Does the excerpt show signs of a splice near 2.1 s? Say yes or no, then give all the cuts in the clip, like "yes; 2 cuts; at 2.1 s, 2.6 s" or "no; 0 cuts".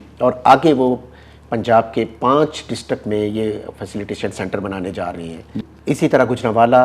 no; 1 cut; at 5.6 s